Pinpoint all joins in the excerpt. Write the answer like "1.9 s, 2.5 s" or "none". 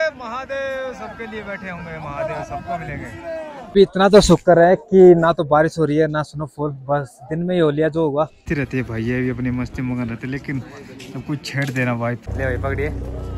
3.7 s, 8.4 s, 12.2 s